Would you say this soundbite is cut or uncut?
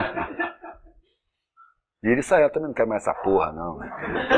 cut